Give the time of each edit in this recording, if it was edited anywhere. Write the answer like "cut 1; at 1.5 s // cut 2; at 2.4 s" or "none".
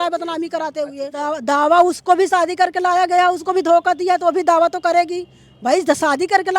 cut 1; at 1.3 s